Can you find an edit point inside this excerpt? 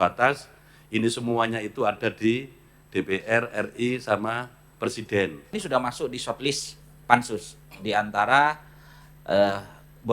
yes; 1 cut; at 5.6 s

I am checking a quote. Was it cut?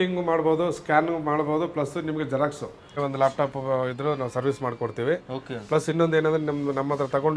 yes; 1 cut; at 3.0 s

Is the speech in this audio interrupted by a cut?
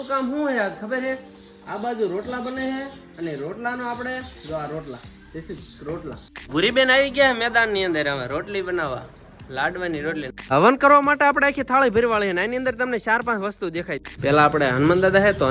yes; 3 cuts; at 6.3 s, 10.5 s, 14.1 s

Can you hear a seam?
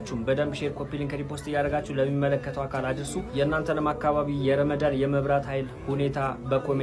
no; 0 cuts

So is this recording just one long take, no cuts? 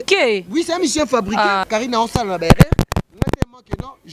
no; 1 cut; at 1.6 s

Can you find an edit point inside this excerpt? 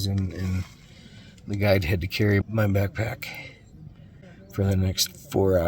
yes; 2 cuts; at 2.4 s, 4.3 s

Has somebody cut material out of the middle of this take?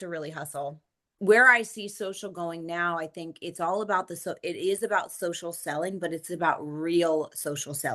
yes; 1 cut; at 1.1 s

